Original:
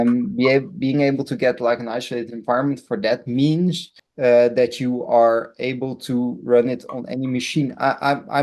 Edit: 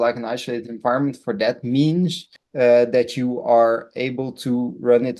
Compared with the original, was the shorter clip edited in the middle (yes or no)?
no